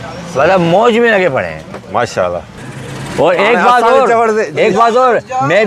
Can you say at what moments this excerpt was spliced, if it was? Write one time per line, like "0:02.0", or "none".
0:02.5